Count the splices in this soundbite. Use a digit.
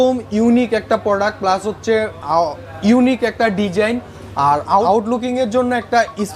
0